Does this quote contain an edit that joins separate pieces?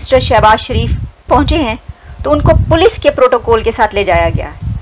yes; 1 cut; at 1.3 s

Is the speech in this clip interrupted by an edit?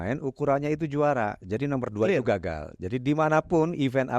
no; 0 cuts

